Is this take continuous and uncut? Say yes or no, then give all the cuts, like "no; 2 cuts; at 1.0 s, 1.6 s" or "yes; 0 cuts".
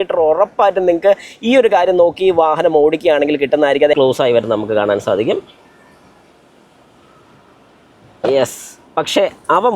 no; 1 cut; at 3.9 s